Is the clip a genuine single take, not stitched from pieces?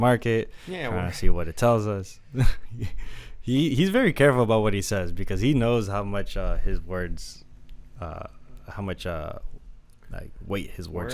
yes; 0 cuts

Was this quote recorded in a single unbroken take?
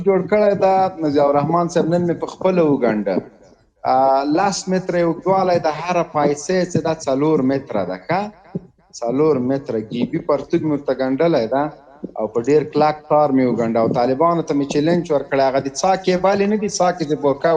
yes; 0 cuts

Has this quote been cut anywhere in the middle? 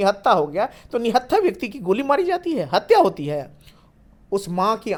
no; 0 cuts

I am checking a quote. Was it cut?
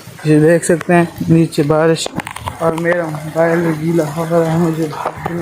no; 0 cuts

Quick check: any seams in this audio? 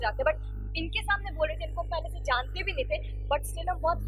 no; 0 cuts

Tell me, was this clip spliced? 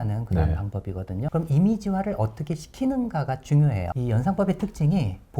yes; 2 cuts; at 1.3 s, 3.9 s

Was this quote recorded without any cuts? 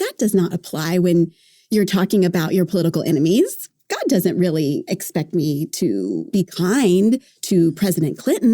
no; 3 cuts; at 1.5 s, 3.6 s, 6.3 s

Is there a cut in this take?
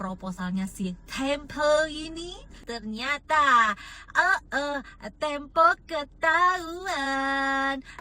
yes; 1 cut; at 2.6 s

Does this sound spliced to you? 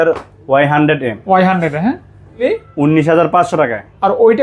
yes; 1 cut; at 2.4 s

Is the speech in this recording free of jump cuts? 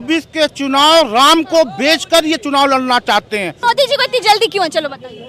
no; 1 cut; at 3.6 s

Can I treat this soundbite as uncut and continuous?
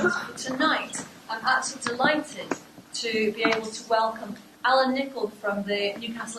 yes; 0 cuts

